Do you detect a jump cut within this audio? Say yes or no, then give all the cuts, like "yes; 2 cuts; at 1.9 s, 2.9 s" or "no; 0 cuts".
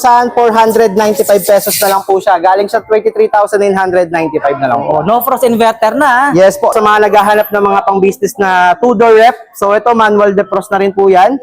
yes; 1 cut; at 6.7 s